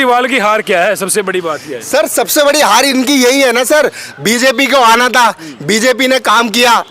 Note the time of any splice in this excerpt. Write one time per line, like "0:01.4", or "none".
none

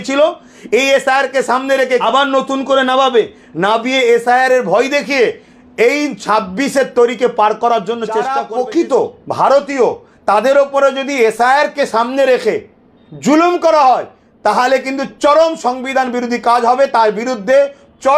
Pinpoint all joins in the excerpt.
0:02.0
0:08.3

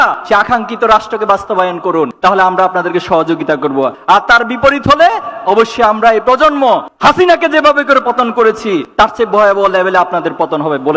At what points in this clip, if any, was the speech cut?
none

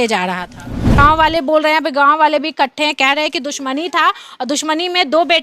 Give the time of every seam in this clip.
0:01.0

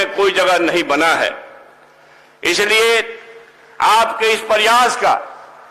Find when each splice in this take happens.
none

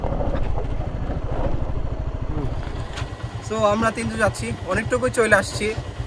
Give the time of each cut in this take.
0:03.3

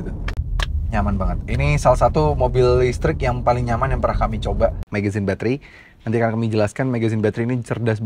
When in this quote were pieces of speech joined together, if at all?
0:04.9

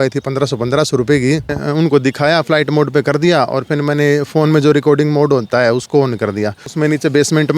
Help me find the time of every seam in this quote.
0:01.6
0:06.7

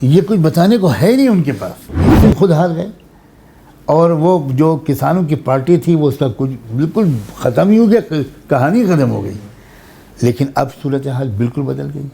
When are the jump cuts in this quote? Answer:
0:02.1

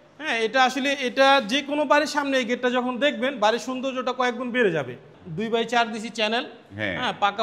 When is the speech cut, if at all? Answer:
0:05.2

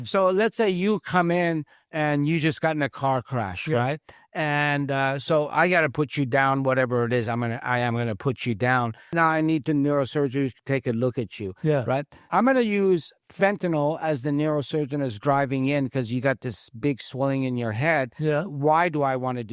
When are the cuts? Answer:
0:09.1
0:12.2

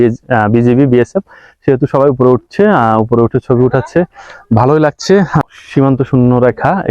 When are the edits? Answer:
0:05.4

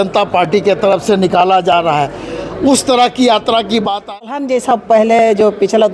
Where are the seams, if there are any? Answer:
0:04.2

